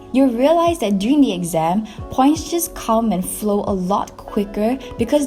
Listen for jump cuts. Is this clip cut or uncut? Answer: uncut